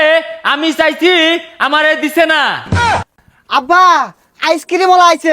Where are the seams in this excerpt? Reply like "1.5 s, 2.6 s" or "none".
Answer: 2.8 s